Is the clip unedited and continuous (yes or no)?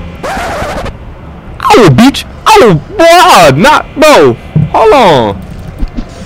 yes